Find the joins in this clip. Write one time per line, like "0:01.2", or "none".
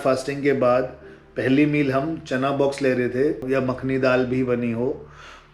0:03.4